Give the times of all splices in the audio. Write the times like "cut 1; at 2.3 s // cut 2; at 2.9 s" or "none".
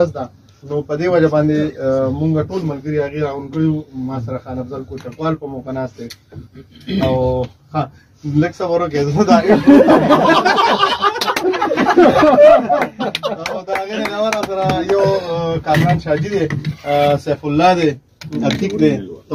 none